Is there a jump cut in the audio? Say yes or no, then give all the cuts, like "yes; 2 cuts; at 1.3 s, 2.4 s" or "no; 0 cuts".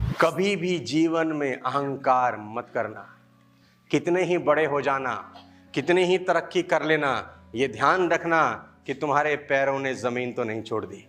no; 0 cuts